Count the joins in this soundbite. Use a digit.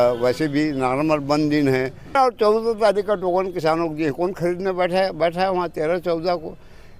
1